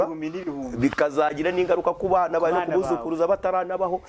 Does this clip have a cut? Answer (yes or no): no